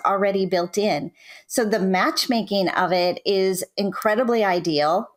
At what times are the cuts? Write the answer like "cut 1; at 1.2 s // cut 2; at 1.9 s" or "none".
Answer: none